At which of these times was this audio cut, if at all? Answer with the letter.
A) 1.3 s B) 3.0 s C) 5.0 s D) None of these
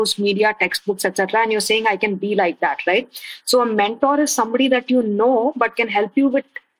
D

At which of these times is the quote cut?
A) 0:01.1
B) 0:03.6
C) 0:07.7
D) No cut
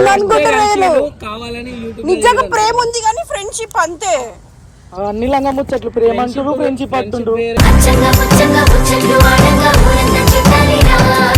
D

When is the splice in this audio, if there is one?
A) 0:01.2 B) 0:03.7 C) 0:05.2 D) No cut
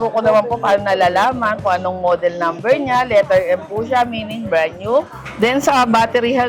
C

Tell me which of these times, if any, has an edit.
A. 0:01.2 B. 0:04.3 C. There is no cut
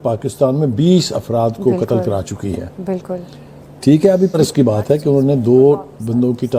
B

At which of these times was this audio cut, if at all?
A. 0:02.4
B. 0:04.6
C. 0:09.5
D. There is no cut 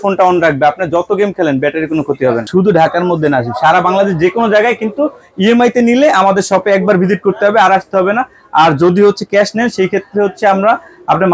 A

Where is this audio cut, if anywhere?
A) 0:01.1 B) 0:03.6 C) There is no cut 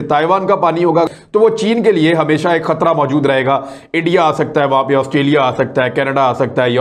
A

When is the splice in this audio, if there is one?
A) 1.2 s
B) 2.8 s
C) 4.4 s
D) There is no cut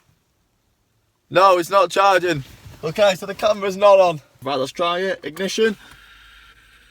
C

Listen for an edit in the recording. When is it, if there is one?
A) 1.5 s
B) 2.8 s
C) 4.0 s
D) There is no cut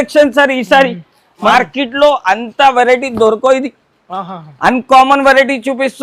A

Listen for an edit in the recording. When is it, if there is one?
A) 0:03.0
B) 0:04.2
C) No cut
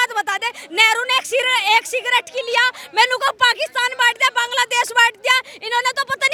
C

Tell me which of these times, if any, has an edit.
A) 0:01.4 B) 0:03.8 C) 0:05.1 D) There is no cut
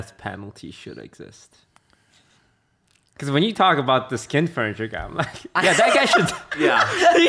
D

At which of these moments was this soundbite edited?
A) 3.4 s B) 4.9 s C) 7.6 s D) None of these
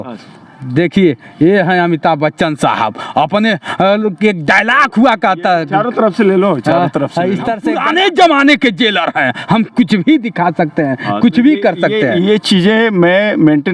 C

